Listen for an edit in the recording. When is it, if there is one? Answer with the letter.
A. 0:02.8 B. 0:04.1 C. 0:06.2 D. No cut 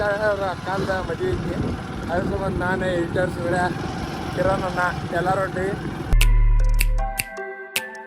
C